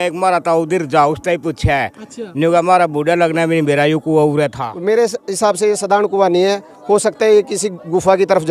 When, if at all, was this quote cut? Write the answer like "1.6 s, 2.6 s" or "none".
4.7 s